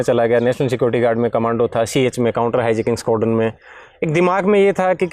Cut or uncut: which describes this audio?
uncut